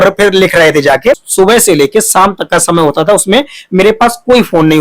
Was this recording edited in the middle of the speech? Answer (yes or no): yes